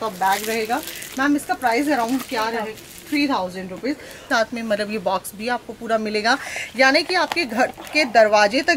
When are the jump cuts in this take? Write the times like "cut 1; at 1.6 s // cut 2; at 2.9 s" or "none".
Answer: cut 1; at 4.3 s